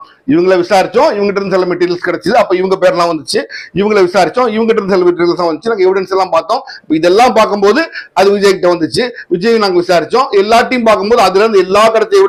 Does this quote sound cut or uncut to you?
uncut